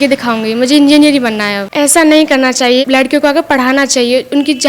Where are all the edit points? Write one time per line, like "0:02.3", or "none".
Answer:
0:01.6
0:02.8